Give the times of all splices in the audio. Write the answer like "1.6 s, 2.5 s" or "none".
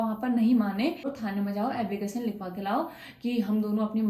1.1 s